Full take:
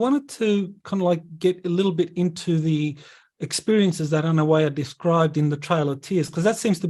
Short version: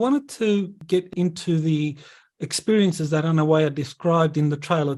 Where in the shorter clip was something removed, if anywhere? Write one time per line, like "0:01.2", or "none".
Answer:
0:01.0